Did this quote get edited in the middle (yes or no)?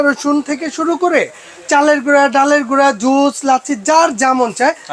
no